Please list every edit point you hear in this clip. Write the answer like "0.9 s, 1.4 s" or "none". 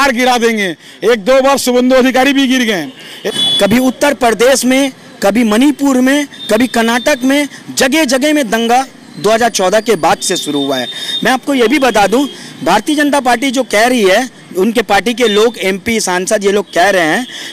3.1 s